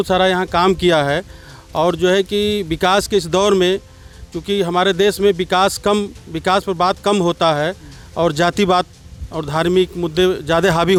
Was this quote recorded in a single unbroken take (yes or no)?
yes